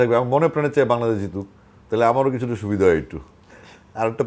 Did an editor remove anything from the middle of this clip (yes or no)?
no